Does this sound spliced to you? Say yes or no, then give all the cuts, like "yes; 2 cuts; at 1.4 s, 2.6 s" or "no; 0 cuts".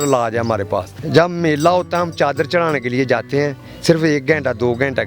yes; 1 cut; at 1.0 s